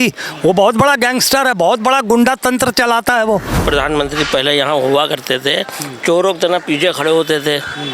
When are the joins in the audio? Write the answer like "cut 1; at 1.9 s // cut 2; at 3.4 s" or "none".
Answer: cut 1; at 3.6 s

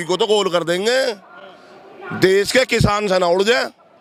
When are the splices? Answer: none

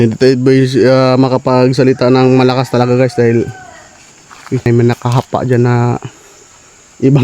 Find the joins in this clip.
cut 1; at 4.7 s

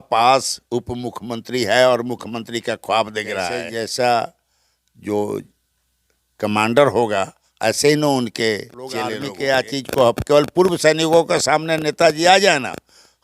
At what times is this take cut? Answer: cut 1; at 3.7 s // cut 2; at 9.2 s

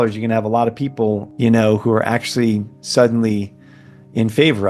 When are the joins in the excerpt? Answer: cut 1; at 1.3 s

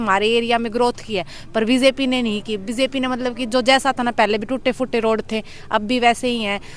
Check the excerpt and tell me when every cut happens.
none

